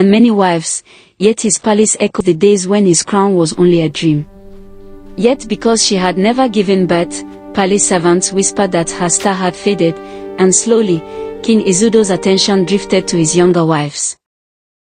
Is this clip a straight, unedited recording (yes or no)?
no